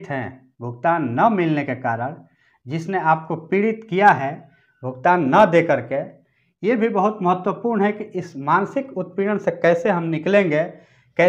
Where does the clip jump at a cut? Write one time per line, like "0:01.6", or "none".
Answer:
none